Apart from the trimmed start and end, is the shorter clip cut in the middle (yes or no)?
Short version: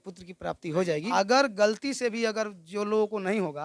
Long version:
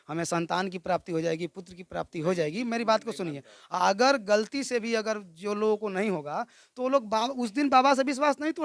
yes